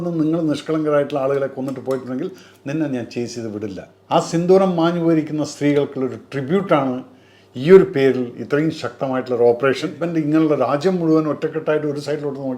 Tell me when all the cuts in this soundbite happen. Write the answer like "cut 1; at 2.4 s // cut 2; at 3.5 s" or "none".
cut 1; at 3.9 s // cut 2; at 10.0 s

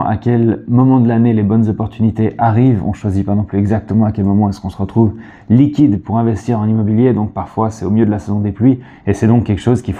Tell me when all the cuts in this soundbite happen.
none

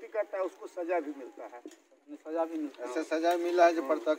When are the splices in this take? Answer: none

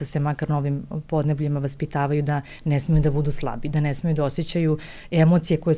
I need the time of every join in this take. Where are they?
none

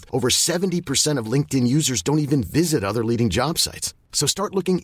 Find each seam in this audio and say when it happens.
none

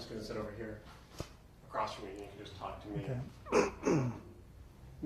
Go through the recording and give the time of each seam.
none

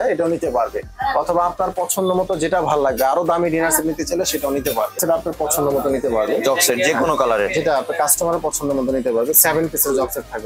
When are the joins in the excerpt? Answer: cut 1; at 5.0 s

